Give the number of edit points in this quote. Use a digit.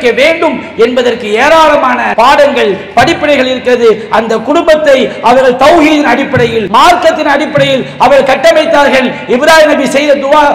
2